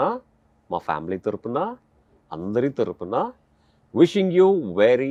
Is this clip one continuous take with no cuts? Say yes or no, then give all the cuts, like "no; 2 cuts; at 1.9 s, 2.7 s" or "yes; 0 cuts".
yes; 0 cuts